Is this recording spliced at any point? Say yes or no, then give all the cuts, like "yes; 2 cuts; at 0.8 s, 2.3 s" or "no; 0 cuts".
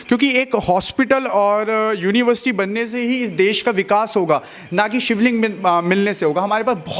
no; 0 cuts